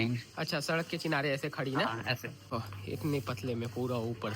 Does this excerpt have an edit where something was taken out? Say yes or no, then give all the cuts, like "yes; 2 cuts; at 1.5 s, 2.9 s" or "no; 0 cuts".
yes; 1 cut; at 2.5 s